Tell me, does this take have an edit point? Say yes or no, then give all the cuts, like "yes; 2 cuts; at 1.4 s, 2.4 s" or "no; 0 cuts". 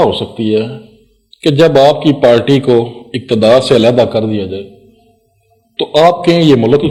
no; 0 cuts